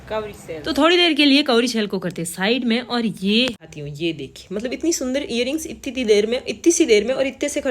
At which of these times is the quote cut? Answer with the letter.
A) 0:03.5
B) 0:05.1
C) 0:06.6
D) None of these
A